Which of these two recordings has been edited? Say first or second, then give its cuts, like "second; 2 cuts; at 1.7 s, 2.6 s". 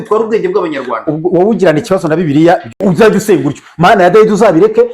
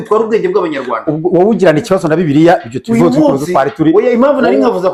first; 1 cut; at 2.7 s